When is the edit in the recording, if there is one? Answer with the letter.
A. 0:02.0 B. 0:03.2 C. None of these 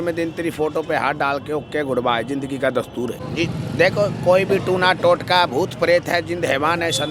B